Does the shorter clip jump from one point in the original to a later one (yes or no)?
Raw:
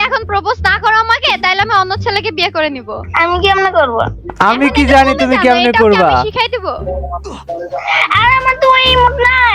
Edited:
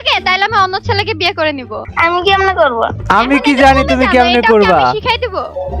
yes